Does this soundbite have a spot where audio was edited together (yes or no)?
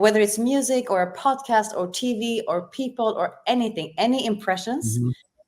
no